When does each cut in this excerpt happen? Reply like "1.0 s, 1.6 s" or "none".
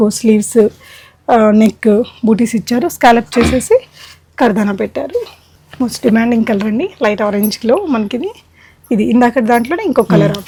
none